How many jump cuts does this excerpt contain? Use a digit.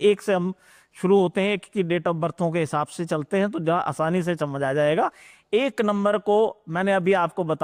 0